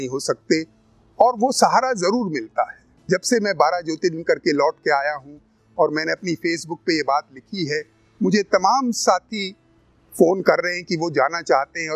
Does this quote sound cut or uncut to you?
cut